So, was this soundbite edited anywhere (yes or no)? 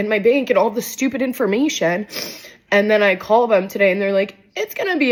no